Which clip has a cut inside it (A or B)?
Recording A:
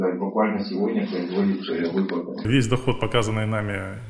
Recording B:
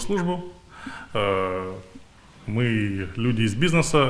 A